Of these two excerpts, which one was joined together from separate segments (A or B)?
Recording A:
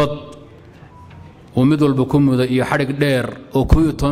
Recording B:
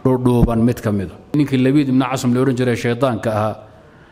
B